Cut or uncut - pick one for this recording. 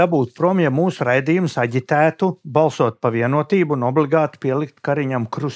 uncut